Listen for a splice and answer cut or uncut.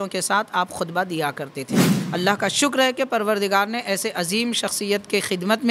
cut